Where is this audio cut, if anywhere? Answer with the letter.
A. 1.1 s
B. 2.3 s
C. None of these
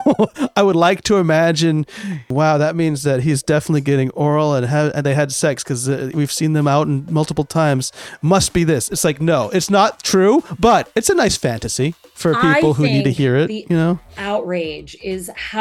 B